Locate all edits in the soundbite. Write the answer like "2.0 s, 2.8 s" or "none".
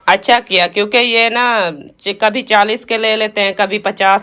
none

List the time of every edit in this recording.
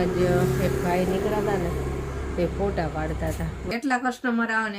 3.7 s

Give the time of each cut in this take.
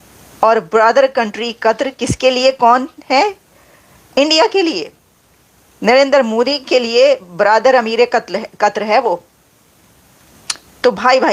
none

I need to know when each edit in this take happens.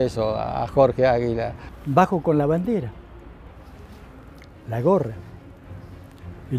1.5 s

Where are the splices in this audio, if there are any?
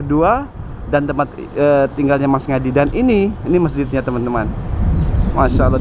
none

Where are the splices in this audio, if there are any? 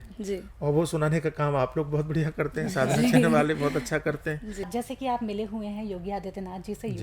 4.7 s

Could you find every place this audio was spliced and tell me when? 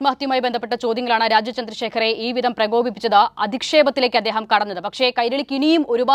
none

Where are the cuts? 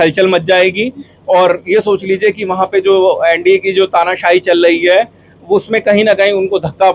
none

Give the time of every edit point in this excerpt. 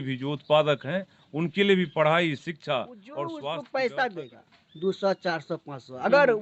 3.4 s

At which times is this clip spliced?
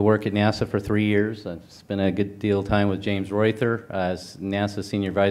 none

